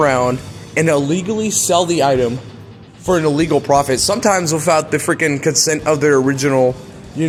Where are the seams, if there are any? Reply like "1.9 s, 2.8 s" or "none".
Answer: none